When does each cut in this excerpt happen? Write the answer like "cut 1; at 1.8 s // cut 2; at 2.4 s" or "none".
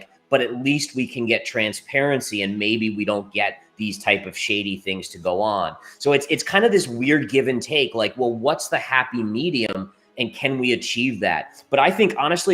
none